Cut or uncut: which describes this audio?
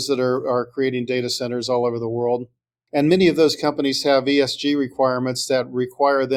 uncut